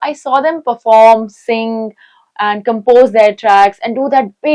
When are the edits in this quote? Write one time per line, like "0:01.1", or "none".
none